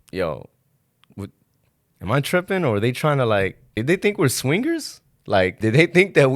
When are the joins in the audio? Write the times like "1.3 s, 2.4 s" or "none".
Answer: 3.7 s, 5.6 s